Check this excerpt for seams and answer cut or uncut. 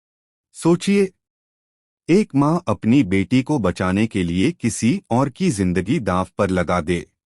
cut